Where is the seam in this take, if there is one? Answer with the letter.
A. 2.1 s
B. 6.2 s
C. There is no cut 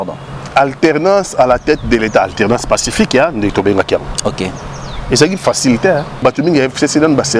B